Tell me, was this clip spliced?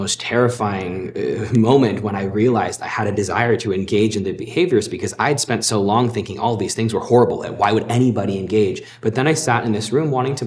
yes; 1 cut; at 8.9 s

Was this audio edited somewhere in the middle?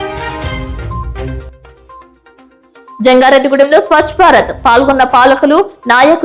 yes; 1 cut; at 1.1 s

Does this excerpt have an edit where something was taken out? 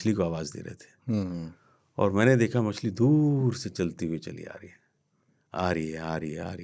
no; 0 cuts

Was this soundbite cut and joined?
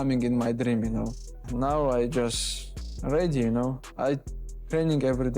yes; 1 cut; at 1.3 s

